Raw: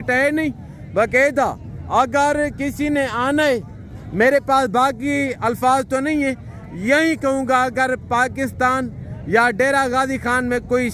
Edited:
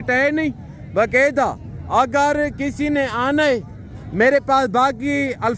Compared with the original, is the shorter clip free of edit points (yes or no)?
yes